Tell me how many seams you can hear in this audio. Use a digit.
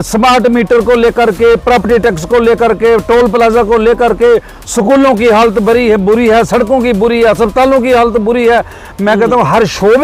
0